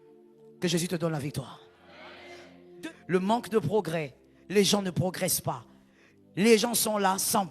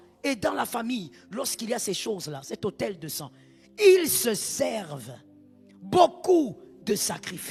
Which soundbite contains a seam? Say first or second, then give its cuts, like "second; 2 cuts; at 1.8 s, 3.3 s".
first; 1 cut; at 2.4 s